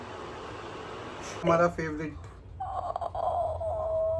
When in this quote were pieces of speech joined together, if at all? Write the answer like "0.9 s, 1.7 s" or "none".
1.4 s